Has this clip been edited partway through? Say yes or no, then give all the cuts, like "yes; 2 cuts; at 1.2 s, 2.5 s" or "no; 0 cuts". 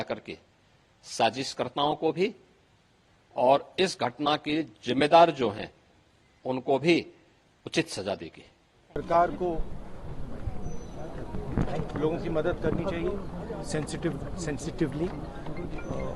no; 0 cuts